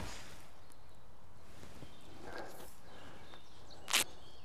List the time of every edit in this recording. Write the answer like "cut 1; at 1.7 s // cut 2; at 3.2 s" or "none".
none